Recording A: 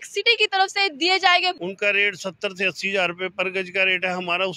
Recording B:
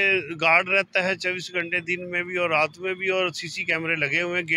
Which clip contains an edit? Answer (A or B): A